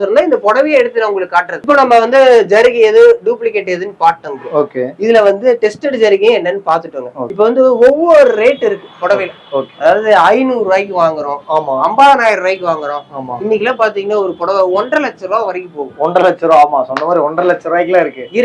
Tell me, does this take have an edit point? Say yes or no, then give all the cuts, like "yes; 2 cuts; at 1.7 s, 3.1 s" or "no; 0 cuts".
no; 0 cuts